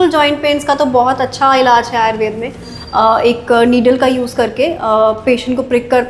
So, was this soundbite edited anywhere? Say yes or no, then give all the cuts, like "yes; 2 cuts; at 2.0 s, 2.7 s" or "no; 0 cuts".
yes; 1 cut; at 2.7 s